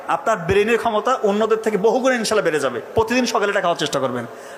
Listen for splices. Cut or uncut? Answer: uncut